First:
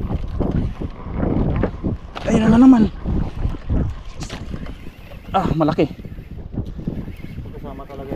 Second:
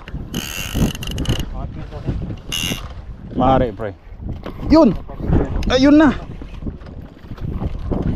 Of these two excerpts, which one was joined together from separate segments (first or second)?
second